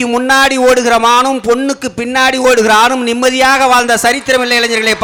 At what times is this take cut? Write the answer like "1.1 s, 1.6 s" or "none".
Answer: none